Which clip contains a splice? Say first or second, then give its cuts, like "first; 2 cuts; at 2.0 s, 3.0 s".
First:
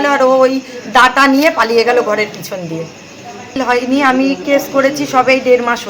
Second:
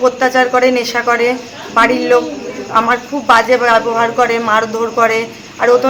first; 1 cut; at 3.6 s